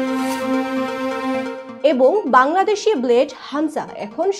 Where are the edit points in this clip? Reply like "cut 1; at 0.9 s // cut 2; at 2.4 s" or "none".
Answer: cut 1; at 1.1 s